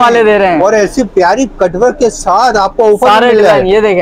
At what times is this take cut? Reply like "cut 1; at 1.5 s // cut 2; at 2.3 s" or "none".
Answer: none